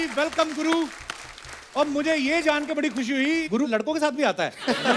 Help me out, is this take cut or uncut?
uncut